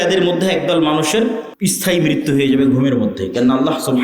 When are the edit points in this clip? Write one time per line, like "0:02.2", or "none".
0:01.5